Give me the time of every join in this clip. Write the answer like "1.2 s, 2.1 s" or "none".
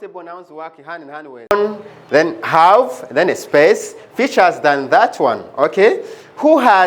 1.5 s

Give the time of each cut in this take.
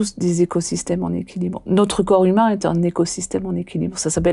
none

